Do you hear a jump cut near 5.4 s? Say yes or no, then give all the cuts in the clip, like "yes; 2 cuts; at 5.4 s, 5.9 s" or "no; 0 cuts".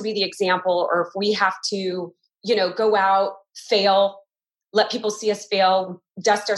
no; 0 cuts